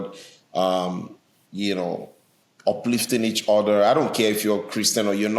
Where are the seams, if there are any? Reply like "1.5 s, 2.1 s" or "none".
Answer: none